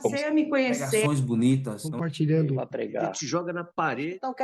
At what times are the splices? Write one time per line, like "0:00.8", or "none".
none